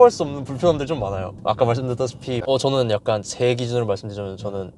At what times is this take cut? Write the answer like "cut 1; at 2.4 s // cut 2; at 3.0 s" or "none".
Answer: cut 1; at 2.4 s